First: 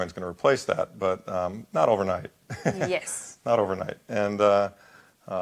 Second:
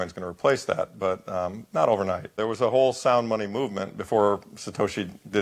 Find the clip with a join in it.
second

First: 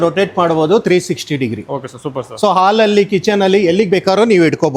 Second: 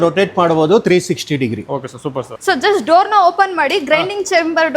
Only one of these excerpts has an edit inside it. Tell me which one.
second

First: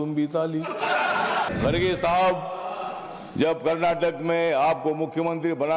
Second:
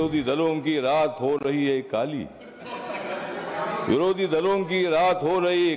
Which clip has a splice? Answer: first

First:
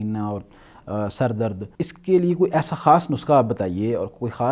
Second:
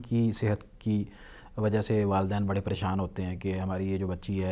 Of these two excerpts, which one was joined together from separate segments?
first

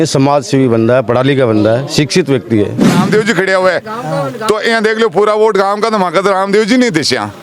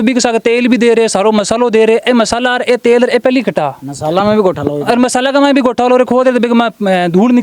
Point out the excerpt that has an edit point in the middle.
first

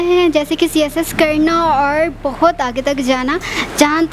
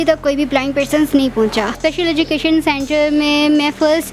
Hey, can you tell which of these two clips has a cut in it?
second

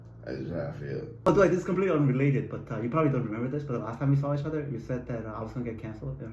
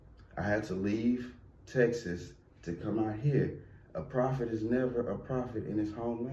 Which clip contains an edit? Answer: first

